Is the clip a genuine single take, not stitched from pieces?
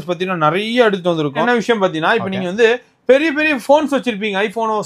no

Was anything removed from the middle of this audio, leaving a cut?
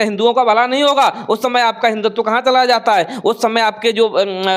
no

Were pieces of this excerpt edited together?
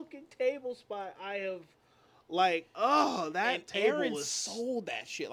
no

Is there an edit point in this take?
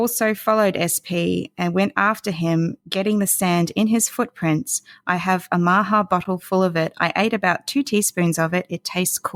no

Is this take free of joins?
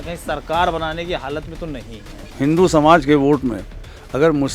no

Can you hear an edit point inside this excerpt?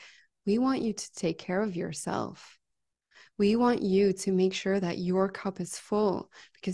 no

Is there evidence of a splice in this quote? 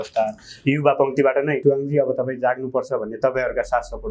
yes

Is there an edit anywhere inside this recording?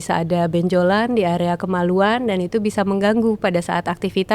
no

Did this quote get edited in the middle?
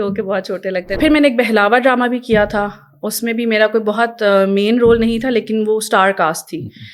yes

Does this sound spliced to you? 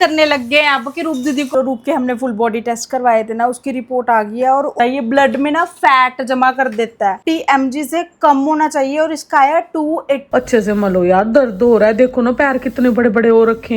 yes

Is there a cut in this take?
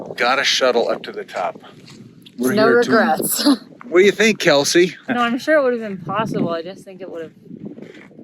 yes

